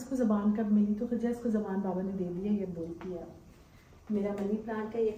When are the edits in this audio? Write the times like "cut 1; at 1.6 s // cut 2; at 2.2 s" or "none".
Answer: none